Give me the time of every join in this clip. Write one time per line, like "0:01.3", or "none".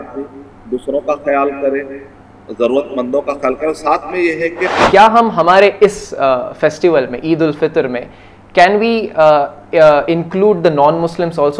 0:04.6